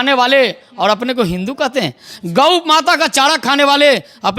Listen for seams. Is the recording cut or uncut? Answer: uncut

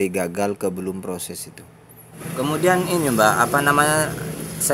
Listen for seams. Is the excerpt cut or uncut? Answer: cut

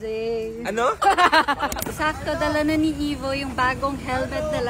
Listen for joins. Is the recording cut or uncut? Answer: cut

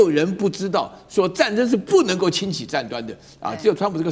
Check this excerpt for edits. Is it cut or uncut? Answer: uncut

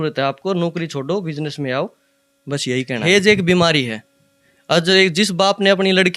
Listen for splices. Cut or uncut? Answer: cut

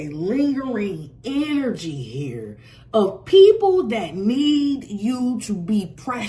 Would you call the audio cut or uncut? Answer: uncut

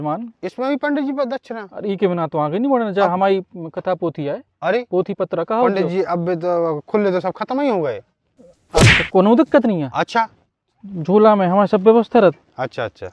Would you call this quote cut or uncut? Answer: uncut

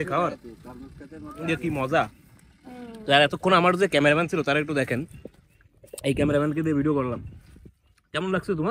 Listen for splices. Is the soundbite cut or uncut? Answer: uncut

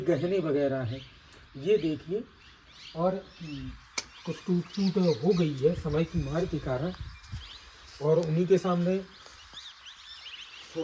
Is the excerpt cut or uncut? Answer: uncut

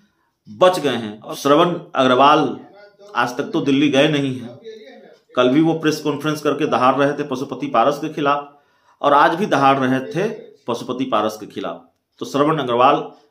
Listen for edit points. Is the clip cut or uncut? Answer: cut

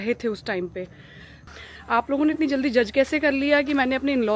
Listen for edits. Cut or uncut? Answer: cut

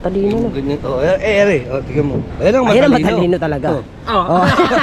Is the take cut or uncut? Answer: uncut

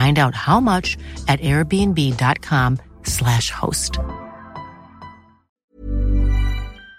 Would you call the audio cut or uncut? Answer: cut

